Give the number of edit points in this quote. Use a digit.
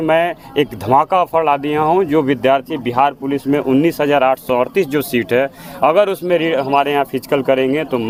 0